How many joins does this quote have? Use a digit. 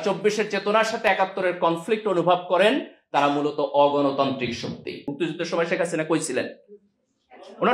1